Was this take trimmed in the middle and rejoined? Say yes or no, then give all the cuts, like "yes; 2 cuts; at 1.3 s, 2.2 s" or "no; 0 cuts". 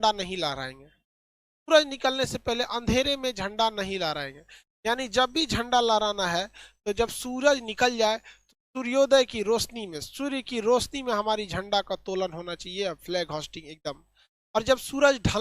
no; 0 cuts